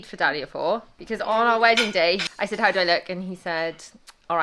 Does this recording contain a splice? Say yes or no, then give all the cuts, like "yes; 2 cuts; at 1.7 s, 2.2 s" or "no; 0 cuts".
yes; 2 cuts; at 0.9 s, 2.3 s